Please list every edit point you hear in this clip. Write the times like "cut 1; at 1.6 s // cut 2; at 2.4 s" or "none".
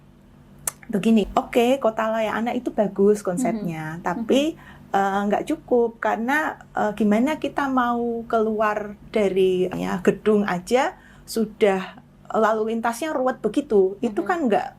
cut 1; at 1.3 s // cut 2; at 9.7 s